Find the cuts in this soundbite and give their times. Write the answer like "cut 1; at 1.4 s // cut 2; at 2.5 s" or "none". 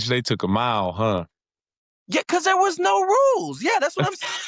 none